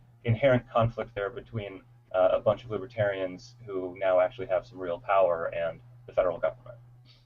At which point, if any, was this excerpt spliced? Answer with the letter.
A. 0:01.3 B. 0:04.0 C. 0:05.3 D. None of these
C